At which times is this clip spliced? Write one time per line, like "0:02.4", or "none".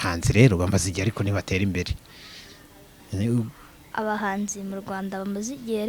none